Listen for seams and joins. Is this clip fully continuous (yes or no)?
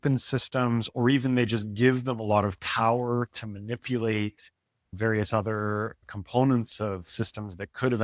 no